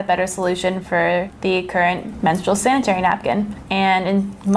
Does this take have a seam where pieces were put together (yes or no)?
no